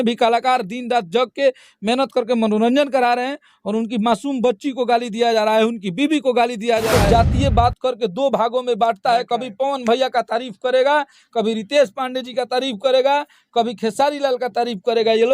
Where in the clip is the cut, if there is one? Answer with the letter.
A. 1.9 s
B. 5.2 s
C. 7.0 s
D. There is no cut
C